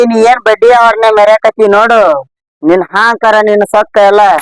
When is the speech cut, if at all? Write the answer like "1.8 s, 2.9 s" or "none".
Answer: none